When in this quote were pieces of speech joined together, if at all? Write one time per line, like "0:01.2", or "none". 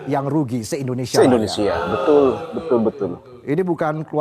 none